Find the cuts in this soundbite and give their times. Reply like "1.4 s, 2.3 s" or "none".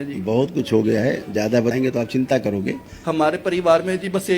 1.7 s